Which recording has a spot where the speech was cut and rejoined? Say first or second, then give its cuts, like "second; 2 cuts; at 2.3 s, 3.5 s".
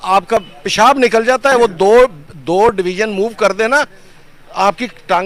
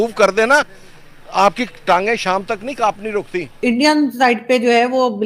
second; 1 cut; at 3.6 s